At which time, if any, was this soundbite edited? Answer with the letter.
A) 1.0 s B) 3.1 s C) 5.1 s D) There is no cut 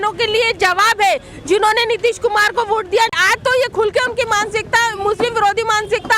B